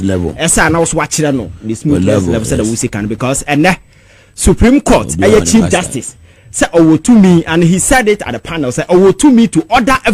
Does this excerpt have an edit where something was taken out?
no; 0 cuts

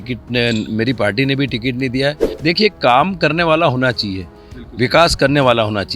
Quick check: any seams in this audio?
yes; 1 cut; at 2.3 s

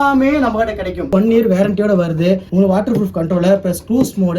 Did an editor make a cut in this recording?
yes; 2 cuts; at 1.1 s, 2.5 s

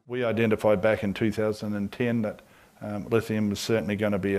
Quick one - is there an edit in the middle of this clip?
no; 0 cuts

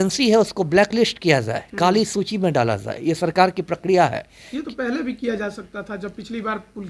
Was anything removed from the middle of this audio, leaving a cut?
no; 0 cuts

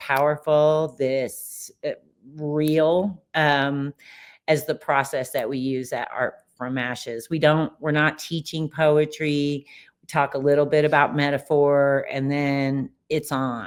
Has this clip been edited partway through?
no; 0 cuts

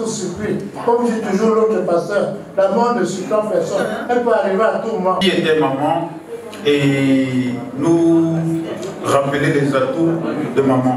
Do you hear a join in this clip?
yes; 1 cut; at 5.2 s

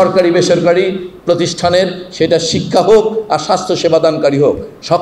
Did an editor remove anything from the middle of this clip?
no; 0 cuts

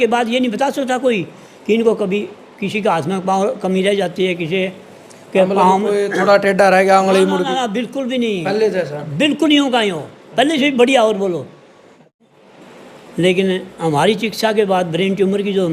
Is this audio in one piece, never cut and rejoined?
no; 1 cut; at 12.2 s

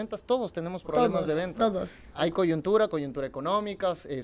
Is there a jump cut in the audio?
no; 0 cuts

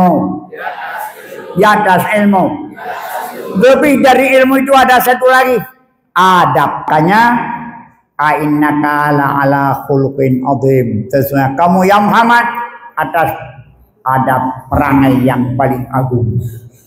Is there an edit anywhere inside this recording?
yes; 1 cut; at 6.9 s

